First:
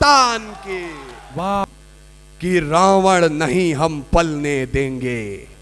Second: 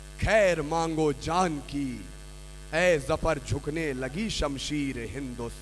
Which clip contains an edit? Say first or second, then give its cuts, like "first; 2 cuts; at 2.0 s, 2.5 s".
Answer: first; 1 cut; at 1.7 s